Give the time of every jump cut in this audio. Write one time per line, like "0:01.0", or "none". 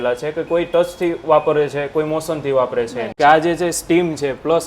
0:03.1